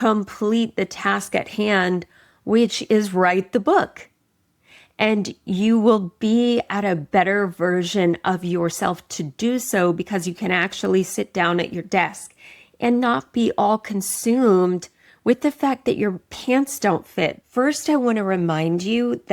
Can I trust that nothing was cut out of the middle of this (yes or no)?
no